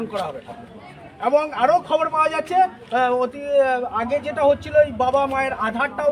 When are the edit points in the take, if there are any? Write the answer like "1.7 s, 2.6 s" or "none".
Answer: none